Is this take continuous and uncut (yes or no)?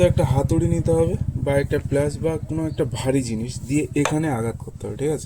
yes